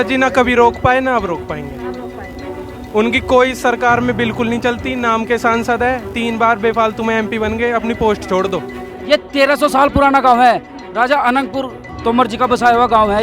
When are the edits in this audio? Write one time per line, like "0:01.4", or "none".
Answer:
0:08.8
0:11.8